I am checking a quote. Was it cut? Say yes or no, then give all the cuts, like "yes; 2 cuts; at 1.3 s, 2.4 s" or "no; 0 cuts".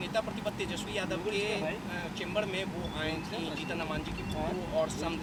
no; 0 cuts